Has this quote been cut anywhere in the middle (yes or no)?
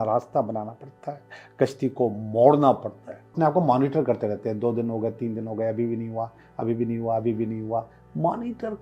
yes